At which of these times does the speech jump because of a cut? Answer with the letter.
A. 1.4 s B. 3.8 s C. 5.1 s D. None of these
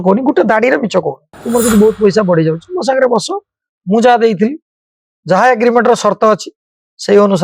A